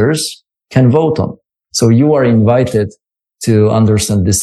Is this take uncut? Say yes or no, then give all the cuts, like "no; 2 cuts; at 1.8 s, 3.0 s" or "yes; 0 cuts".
no; 1 cut; at 1.6 s